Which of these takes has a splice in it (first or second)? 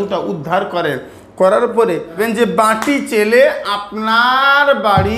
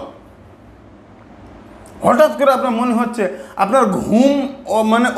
first